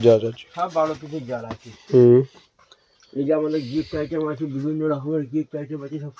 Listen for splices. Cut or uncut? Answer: uncut